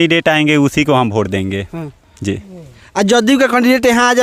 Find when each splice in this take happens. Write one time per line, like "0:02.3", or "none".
none